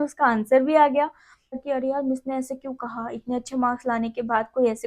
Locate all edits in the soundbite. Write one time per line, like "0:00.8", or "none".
0:01.5